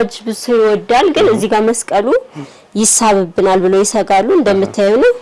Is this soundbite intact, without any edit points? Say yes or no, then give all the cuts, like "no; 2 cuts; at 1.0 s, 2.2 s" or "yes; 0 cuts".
yes; 0 cuts